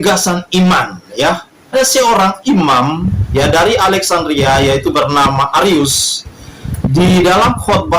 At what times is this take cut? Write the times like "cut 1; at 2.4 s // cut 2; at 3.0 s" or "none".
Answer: cut 1; at 1.7 s